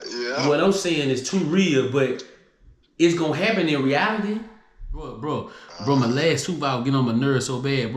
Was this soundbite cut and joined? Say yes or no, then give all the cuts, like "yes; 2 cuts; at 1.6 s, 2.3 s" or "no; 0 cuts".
yes; 1 cut; at 5.1 s